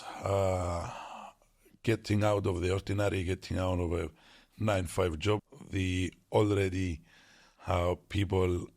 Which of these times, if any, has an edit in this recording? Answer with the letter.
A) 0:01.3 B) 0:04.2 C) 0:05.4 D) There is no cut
C